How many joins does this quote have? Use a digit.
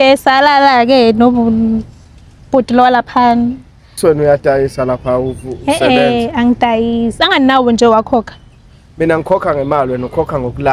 1